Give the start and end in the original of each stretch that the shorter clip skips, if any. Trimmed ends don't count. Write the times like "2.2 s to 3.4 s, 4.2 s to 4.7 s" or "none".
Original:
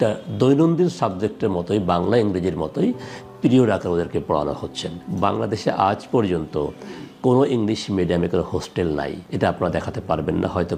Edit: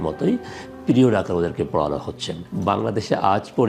none